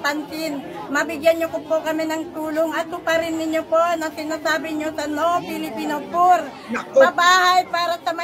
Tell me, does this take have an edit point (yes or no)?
no